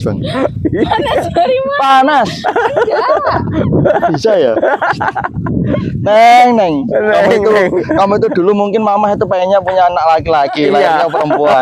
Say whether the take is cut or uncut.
uncut